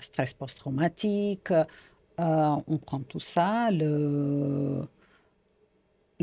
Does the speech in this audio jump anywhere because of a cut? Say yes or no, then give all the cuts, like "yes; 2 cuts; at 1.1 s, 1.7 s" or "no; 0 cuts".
no; 0 cuts